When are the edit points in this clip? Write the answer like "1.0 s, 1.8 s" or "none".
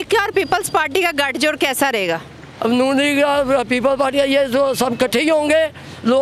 none